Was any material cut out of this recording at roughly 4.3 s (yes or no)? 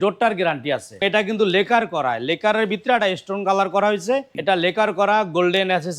yes